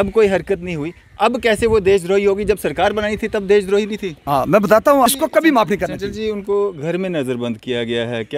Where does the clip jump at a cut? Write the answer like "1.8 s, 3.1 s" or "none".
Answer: 5.1 s